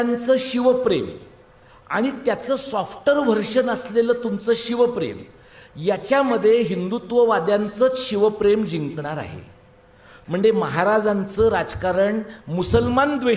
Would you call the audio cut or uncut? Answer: cut